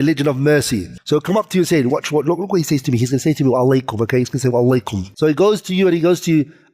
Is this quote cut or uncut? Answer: cut